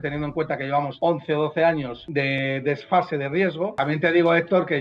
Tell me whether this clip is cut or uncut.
cut